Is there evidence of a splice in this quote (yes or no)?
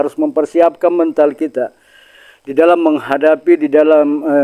no